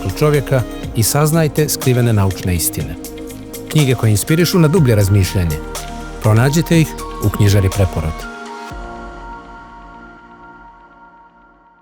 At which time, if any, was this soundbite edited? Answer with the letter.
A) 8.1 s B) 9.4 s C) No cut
A